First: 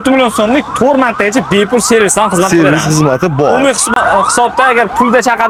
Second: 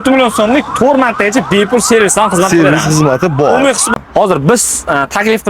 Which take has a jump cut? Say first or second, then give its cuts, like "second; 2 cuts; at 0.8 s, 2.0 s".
second; 1 cut; at 4.0 s